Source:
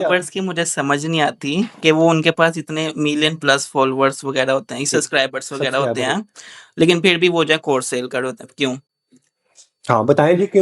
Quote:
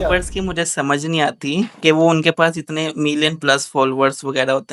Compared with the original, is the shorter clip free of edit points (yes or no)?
yes